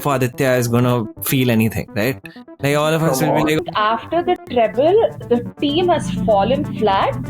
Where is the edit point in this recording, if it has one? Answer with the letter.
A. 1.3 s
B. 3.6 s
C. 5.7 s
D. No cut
B